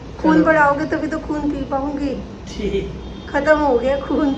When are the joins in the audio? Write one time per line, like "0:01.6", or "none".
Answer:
none